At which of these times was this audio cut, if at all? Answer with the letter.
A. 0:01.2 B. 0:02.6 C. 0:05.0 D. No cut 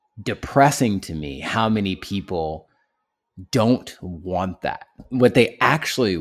C